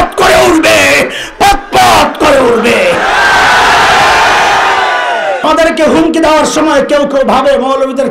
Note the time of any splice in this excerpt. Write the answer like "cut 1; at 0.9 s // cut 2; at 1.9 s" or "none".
cut 1; at 5.4 s